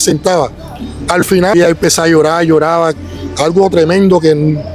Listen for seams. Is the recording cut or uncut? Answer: cut